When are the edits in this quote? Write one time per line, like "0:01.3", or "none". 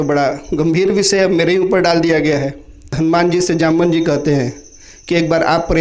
0:02.9